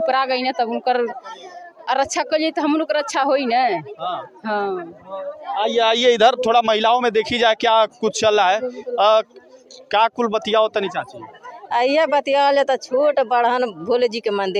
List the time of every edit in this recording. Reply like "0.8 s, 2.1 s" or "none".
none